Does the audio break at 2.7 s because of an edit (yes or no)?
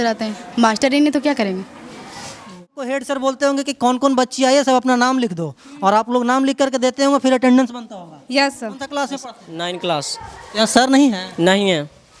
yes